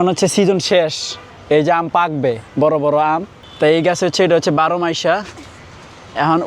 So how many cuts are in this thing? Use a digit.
1